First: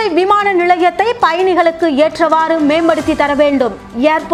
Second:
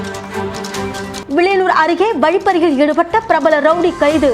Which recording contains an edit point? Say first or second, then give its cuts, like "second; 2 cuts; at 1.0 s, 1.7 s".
second; 1 cut; at 1.1 s